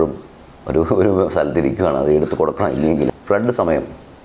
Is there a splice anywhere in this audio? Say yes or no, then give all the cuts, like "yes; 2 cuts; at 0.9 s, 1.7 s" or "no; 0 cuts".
yes; 1 cut; at 3.1 s